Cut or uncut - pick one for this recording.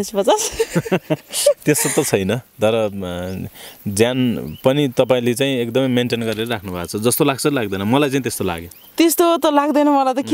uncut